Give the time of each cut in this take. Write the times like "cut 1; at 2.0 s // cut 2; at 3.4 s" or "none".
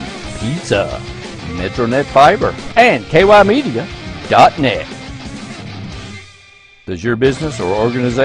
cut 1; at 2.6 s